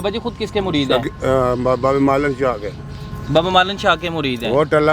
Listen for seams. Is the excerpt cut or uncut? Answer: uncut